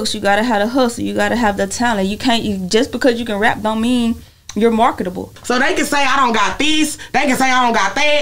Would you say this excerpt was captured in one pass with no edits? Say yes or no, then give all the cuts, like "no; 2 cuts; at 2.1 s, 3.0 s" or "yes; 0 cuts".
no; 1 cut; at 5.3 s